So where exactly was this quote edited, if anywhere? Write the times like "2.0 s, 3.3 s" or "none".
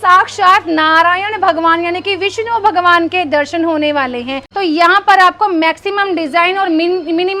4.4 s